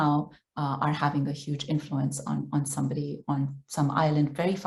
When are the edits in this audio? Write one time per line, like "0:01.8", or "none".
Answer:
none